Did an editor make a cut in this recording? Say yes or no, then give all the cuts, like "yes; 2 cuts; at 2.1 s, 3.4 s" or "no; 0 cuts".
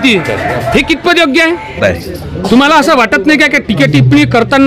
yes; 1 cut; at 1.8 s